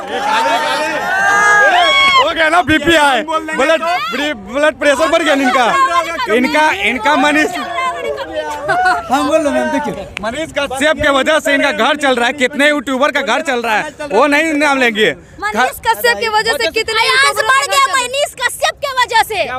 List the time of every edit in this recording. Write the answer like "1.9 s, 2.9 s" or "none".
none